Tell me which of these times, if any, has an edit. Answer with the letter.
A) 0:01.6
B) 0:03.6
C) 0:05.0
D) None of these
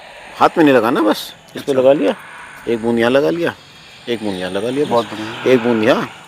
D